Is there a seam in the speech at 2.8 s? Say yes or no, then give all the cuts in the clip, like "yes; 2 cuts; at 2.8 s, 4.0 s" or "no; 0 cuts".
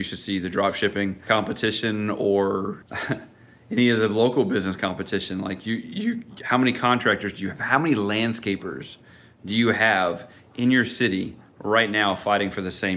yes; 2 cuts; at 1.3 s, 2.8 s